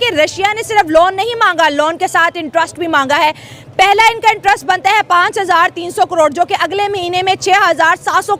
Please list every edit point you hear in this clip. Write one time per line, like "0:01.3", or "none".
none